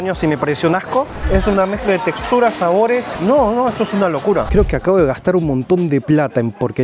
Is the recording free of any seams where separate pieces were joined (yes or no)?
no